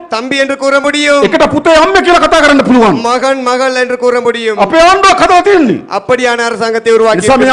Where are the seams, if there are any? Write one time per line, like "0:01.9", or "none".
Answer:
none